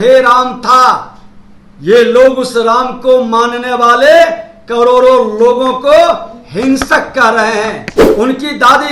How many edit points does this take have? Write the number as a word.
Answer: one